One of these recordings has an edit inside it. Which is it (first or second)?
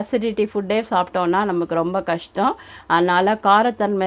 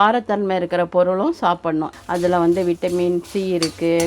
second